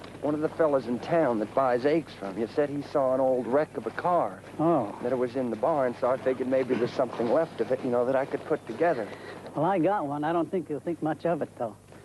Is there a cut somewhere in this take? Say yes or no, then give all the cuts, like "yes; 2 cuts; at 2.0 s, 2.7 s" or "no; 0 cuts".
yes; 1 cut; at 4.4 s